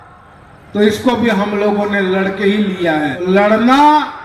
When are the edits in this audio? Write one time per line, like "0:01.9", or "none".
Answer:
0:03.2